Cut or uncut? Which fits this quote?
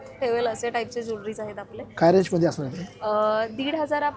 uncut